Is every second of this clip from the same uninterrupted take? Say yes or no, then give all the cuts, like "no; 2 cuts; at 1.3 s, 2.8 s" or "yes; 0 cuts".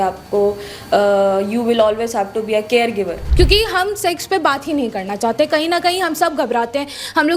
no; 1 cut; at 3.2 s